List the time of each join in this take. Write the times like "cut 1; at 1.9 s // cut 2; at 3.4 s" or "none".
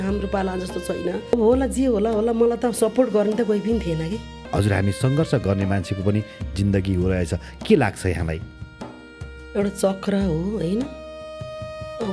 cut 1; at 1.3 s // cut 2; at 4.4 s